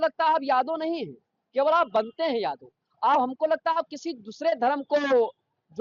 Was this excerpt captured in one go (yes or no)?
yes